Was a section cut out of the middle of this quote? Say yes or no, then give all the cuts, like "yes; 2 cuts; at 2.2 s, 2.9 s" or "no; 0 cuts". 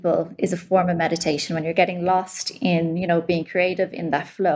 no; 0 cuts